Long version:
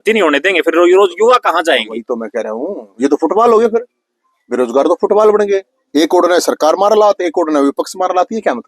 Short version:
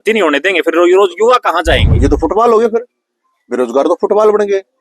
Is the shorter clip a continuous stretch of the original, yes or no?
no